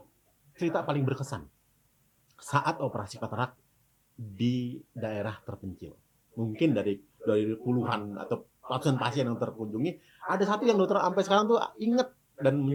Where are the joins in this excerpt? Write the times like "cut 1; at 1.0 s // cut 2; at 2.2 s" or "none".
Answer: none